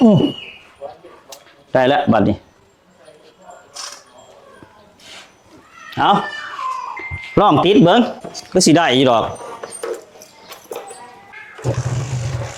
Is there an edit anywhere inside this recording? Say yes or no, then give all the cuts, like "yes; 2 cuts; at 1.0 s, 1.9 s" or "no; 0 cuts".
no; 0 cuts